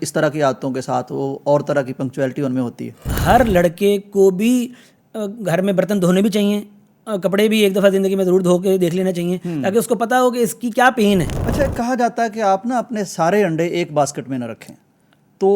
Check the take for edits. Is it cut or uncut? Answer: cut